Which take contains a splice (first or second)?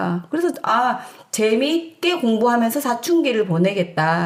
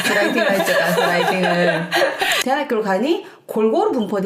second